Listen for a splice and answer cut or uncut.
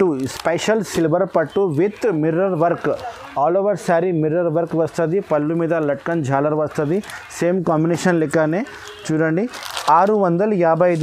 uncut